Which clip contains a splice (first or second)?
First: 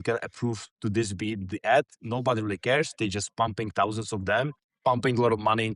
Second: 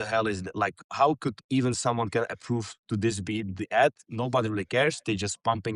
first